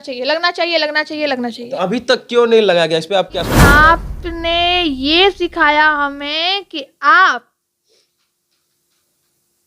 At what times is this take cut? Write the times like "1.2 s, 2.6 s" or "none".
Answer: 3.6 s